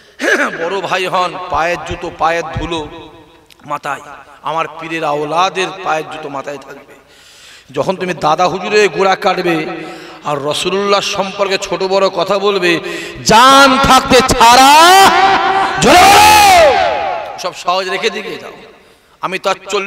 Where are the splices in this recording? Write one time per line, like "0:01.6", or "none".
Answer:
0:17.3